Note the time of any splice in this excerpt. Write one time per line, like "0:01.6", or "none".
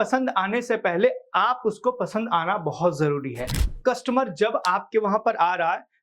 0:03.6